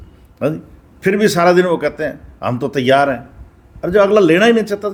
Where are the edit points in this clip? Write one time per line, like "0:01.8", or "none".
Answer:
none